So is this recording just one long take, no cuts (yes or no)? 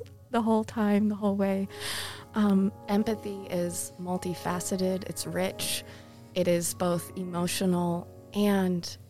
no